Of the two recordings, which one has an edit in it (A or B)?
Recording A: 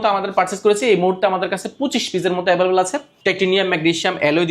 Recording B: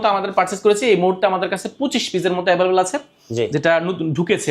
A